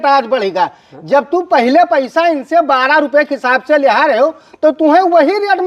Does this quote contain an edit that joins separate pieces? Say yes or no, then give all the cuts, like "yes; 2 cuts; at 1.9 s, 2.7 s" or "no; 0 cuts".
no; 0 cuts